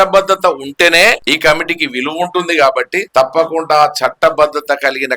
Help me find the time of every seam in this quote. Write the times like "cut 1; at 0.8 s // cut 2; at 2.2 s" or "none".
cut 1; at 1.2 s // cut 2; at 3.0 s